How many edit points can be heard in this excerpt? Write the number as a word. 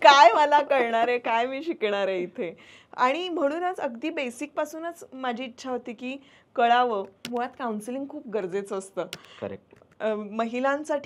one